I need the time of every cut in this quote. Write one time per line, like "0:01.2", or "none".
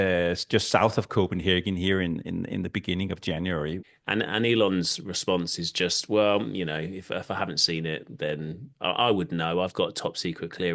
0:03.8